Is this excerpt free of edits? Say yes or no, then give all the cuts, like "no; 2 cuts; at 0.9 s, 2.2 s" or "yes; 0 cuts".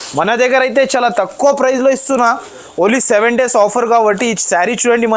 yes; 0 cuts